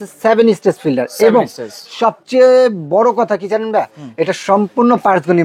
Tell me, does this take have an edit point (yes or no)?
no